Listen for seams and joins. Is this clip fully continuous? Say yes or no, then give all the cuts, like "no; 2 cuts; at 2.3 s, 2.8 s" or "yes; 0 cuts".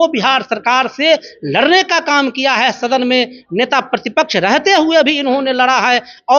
yes; 0 cuts